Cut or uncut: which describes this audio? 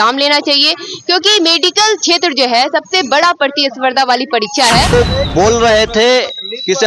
cut